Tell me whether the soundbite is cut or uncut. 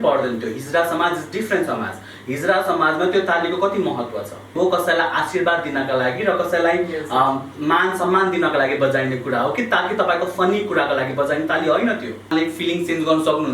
cut